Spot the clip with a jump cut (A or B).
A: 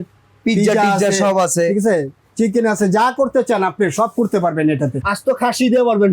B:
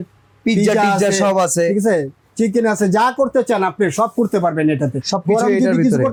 A